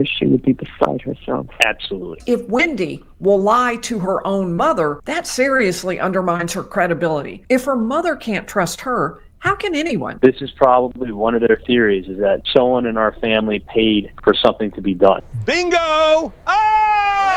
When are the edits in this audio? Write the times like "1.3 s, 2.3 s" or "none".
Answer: 2.2 s, 5.1 s, 7.3 s, 10.1 s